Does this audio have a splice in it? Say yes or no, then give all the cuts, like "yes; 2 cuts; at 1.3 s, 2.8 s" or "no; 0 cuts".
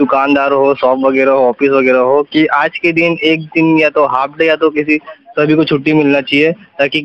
no; 0 cuts